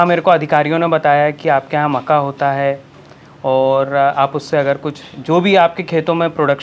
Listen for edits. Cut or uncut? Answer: uncut